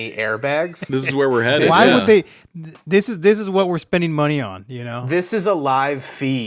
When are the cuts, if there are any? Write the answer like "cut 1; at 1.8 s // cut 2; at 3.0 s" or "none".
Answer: none